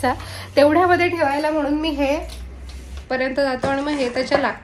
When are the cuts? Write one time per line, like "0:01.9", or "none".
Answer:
0:03.0